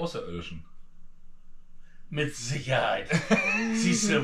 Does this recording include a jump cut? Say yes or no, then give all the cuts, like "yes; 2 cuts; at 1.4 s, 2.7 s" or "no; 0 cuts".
no; 0 cuts